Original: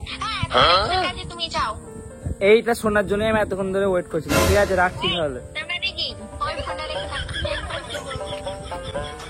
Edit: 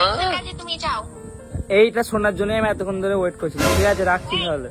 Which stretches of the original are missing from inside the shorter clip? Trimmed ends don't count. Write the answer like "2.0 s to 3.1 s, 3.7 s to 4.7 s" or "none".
none